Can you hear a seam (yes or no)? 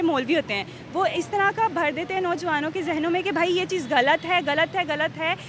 no